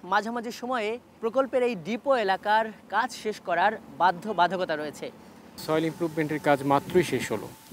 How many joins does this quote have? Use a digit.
2